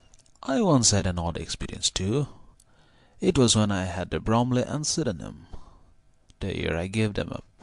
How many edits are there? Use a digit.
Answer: 1